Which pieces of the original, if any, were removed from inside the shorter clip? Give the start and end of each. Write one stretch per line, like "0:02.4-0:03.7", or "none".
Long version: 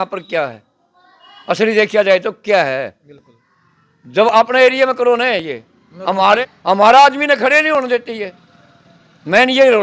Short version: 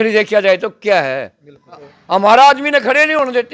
0:03.6-0:06.5